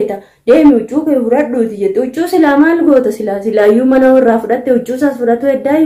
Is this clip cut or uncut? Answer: uncut